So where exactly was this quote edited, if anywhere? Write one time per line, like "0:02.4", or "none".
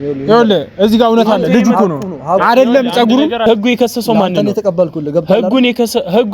0:03.5